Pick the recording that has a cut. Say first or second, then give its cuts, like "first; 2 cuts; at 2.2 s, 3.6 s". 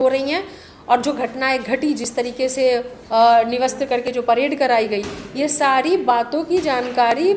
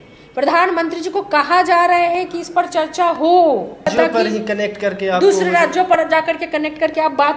second; 1 cut; at 3.9 s